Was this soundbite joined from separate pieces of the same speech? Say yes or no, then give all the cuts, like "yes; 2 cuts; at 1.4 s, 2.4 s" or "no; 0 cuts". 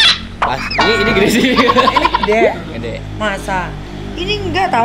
no; 0 cuts